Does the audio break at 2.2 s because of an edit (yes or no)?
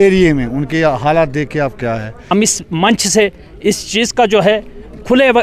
yes